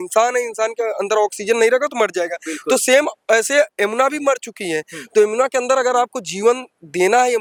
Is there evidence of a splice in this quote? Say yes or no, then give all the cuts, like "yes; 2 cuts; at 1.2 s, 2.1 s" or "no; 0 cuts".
no; 0 cuts